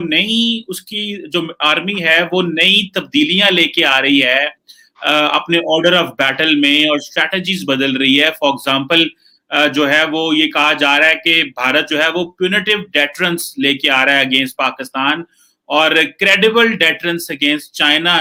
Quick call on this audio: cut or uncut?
uncut